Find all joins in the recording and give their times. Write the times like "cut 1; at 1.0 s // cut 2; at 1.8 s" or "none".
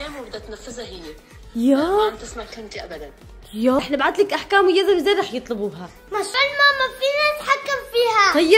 cut 1; at 3.8 s